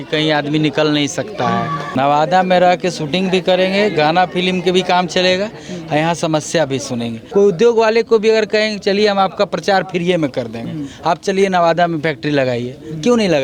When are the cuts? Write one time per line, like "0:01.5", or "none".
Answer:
0:01.8
0:07.2

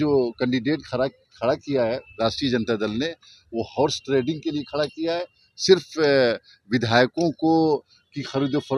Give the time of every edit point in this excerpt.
none

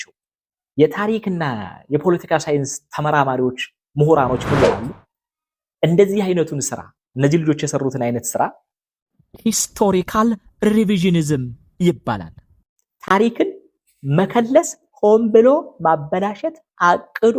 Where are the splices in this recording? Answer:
none

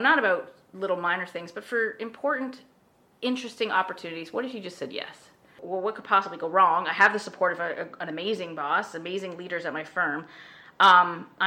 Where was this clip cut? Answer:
0:05.6

